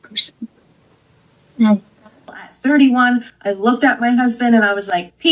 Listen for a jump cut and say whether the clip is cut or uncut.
cut